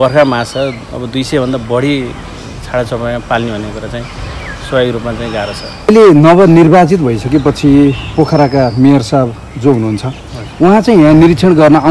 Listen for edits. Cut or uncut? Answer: cut